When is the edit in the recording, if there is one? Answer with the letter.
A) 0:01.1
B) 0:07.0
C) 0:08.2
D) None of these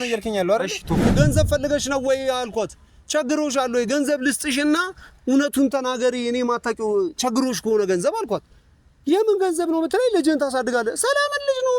A